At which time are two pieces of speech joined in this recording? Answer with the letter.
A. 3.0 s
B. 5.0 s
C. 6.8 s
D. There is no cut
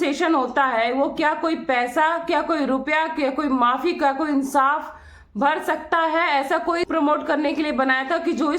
C